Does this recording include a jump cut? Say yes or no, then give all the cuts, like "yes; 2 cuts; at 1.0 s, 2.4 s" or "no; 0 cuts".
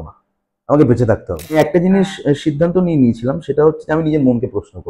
yes; 1 cut; at 1.6 s